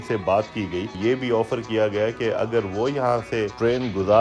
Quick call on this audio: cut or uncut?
cut